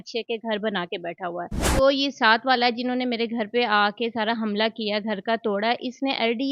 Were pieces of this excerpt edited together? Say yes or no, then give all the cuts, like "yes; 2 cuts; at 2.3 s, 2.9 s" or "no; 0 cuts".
yes; 1 cut; at 1.7 s